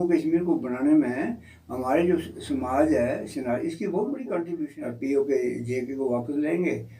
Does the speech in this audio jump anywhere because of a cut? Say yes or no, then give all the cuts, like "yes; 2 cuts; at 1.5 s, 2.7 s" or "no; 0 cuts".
yes; 1 cut; at 4.7 s